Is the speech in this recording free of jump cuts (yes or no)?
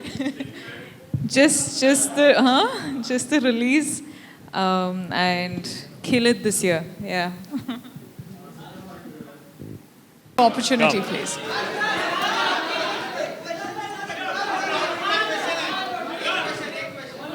no